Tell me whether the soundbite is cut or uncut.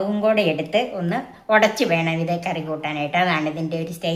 uncut